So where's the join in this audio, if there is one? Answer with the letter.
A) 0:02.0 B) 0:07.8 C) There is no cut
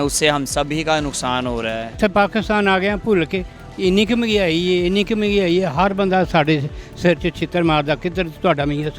A